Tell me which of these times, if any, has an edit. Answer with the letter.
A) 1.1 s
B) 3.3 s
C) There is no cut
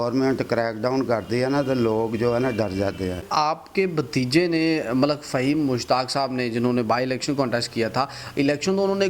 B